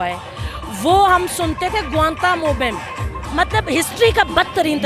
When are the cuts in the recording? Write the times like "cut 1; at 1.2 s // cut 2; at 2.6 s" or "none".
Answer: cut 1; at 3.2 s